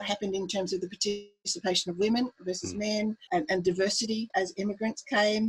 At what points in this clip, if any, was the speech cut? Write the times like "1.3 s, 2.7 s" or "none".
3.3 s, 4.3 s

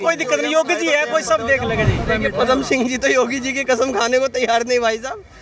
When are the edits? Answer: 2.1 s

